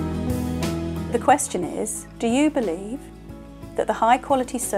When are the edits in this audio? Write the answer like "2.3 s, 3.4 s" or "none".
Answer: 1.1 s